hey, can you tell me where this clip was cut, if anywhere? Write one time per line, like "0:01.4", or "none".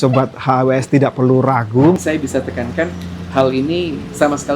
0:02.0

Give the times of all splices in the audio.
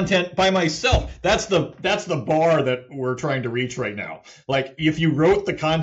none

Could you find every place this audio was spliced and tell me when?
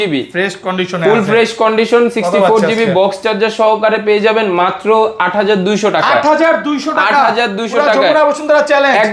none

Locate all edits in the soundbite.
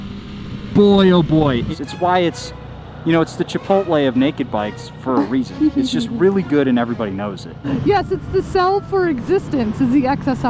0:01.7
0:07.6

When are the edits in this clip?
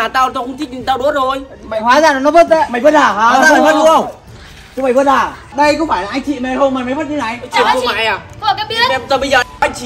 0:05.5

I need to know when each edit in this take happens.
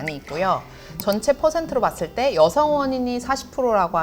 none

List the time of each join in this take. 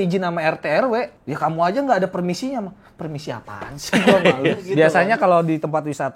0:01.1
0:04.6

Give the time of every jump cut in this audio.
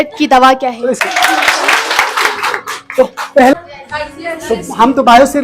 0:01.0
0:03.5

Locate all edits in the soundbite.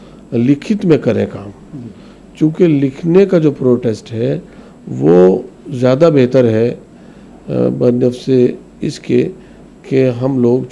none

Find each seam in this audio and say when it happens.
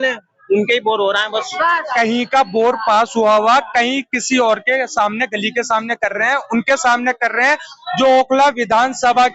0:01.8

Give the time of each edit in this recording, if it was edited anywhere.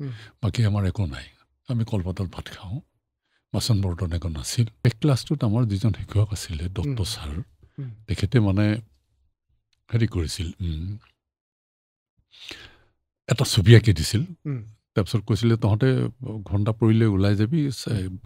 0:04.7

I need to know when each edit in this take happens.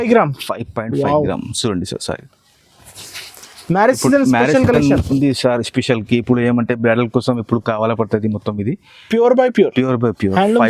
none

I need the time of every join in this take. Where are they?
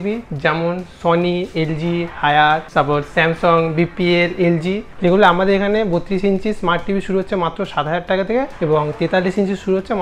0:02.7
0:04.9
0:08.5

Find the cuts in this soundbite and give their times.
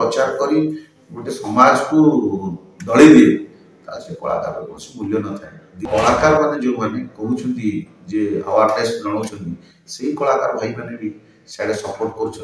0:05.9

